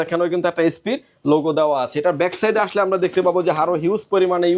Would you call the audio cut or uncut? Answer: uncut